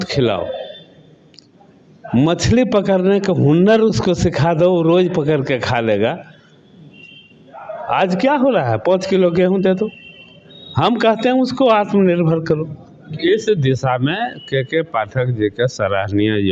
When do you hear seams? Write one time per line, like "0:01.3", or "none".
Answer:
0:13.2